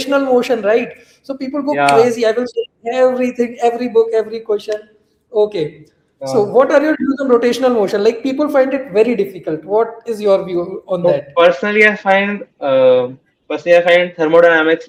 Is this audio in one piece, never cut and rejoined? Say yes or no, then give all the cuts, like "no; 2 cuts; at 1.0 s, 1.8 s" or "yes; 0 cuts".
yes; 0 cuts